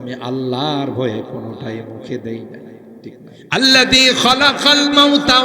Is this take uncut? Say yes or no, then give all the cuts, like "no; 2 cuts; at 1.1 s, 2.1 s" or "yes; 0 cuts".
no; 1 cut; at 3.3 s